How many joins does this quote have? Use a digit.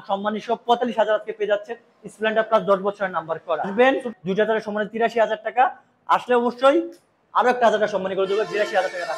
1